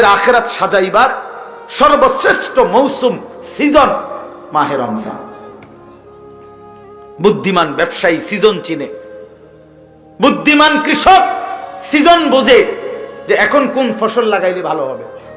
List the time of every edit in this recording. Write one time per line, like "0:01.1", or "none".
none